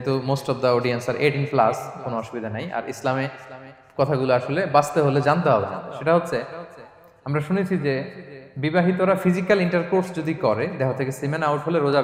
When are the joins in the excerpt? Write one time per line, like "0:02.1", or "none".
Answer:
none